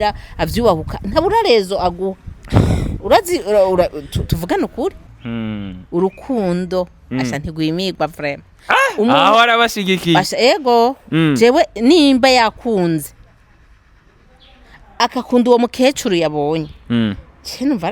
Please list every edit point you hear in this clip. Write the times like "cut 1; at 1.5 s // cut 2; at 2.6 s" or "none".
cut 1; at 5.0 s